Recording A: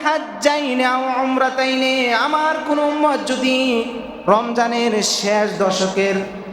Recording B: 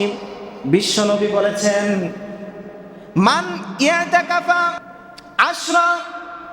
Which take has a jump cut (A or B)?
B